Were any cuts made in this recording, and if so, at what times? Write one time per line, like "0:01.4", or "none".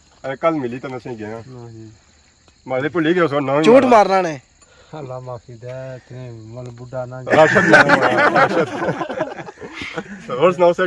none